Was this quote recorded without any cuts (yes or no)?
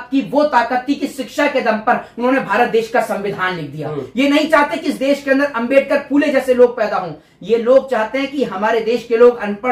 yes